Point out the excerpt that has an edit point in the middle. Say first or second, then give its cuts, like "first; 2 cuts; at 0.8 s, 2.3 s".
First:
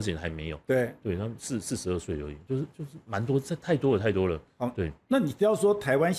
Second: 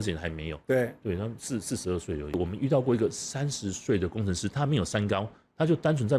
second; 1 cut; at 2.3 s